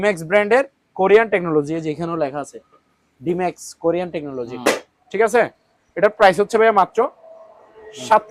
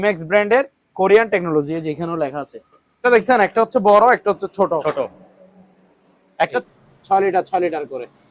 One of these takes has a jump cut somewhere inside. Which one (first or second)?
second